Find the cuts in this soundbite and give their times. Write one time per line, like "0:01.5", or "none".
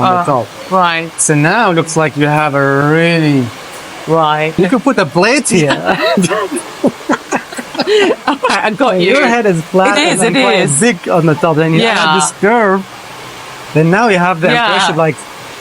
0:04.5